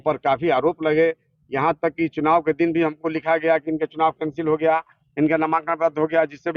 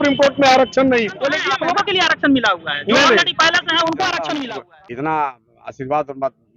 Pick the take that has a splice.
second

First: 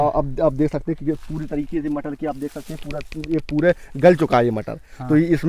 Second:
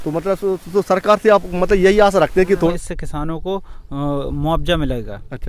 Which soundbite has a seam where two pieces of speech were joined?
second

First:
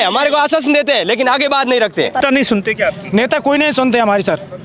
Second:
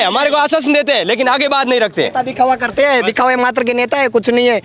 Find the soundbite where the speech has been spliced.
first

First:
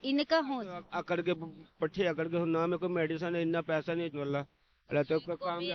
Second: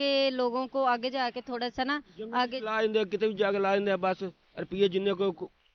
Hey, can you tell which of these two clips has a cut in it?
first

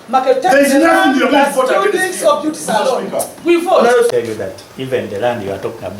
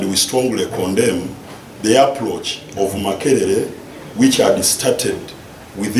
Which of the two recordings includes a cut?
first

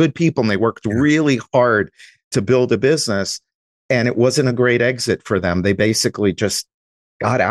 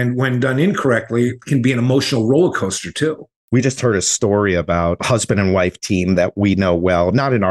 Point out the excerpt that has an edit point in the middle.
second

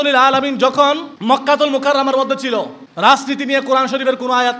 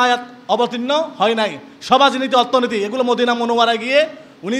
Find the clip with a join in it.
first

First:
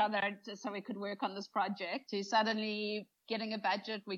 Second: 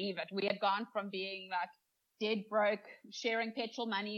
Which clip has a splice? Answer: first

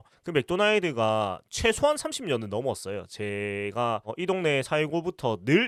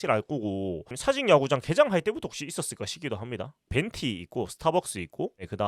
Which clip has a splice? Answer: second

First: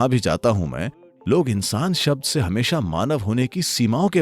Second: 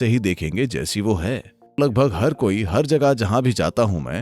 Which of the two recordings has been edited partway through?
second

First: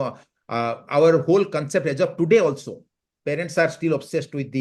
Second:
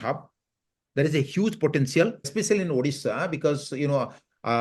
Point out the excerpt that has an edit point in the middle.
second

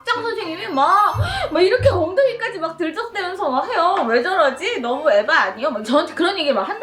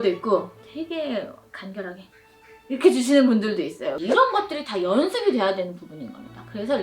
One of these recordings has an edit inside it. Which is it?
second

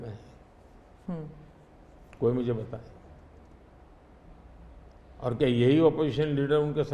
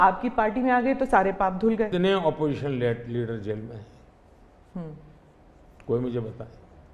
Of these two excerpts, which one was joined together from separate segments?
second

